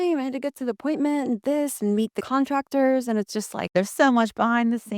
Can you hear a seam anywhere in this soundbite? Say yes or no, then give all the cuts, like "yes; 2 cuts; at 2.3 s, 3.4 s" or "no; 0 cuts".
yes; 2 cuts; at 2.2 s, 3.7 s